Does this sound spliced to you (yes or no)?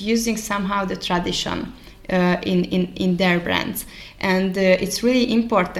no